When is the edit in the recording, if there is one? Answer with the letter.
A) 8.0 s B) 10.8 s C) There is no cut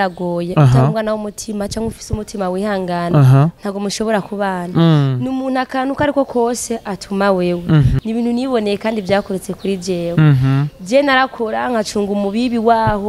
A